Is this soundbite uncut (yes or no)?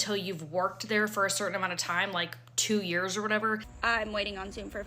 no